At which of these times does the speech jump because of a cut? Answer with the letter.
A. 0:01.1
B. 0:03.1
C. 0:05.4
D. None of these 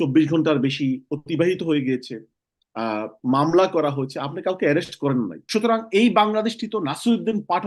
C